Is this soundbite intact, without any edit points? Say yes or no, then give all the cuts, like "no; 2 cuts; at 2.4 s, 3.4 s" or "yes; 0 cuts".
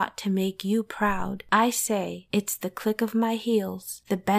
yes; 0 cuts